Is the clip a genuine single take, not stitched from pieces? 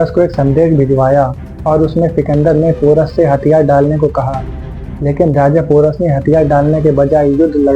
yes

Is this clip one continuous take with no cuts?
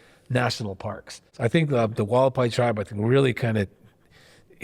no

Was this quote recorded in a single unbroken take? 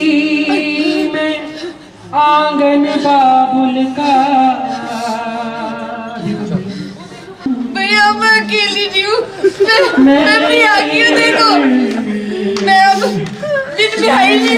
no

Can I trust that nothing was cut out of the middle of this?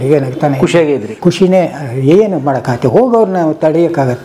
no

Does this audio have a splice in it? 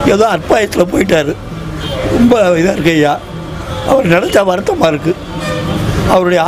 no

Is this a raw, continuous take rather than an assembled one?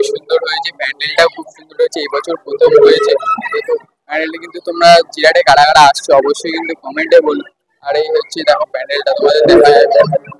yes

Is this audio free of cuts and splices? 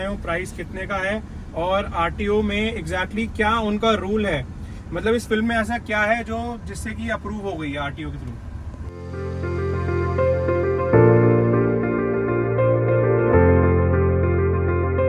yes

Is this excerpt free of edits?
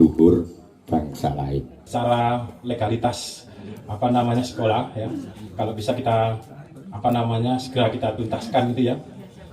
no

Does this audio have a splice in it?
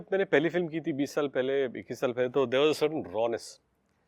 no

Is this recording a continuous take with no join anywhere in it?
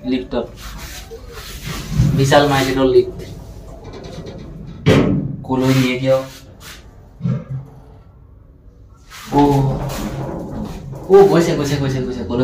yes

